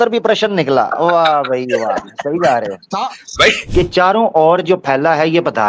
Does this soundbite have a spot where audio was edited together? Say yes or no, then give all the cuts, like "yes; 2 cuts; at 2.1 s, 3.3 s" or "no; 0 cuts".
yes; 1 cut; at 3.6 s